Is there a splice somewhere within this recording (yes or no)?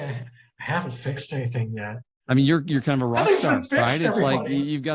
yes